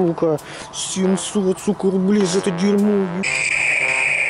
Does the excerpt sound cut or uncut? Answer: cut